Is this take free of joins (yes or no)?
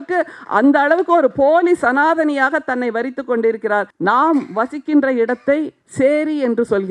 no